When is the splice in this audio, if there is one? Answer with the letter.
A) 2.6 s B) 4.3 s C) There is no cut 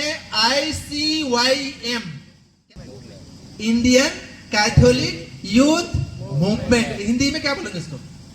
A